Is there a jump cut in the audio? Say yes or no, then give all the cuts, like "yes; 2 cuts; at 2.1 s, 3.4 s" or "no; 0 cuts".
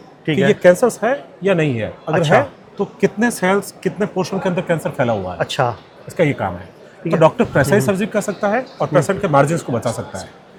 no; 0 cuts